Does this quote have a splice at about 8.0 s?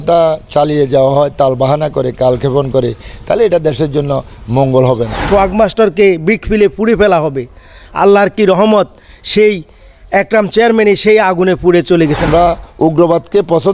no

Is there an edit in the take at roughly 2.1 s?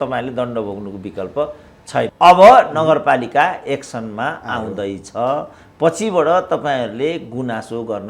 yes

